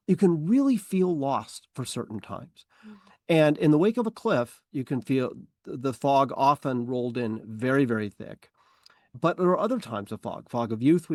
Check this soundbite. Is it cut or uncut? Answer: uncut